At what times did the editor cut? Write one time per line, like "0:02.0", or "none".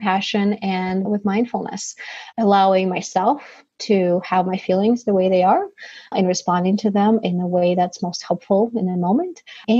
0:01.0